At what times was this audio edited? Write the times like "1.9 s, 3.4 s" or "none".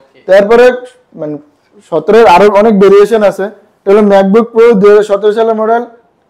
none